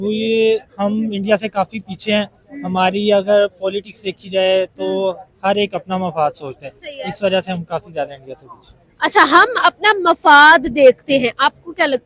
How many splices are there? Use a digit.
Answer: 0